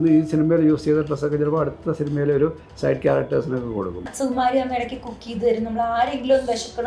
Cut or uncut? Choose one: cut